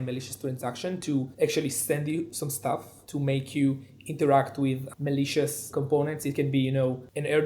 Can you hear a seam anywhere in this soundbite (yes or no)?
yes